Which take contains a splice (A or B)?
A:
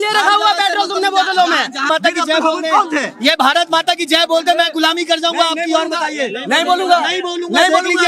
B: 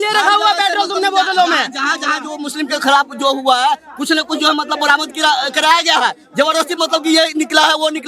A